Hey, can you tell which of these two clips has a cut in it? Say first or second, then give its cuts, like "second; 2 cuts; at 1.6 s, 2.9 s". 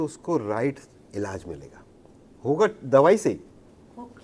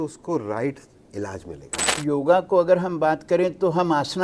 second; 1 cut; at 2.0 s